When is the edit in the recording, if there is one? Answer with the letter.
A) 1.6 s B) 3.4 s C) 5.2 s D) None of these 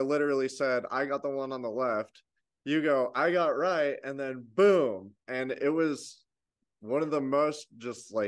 D